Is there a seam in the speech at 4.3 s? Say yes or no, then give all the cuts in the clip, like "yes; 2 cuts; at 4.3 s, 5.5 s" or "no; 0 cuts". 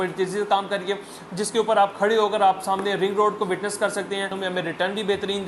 yes; 1 cut; at 4.3 s